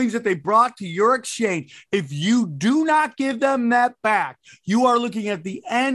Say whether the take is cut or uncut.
uncut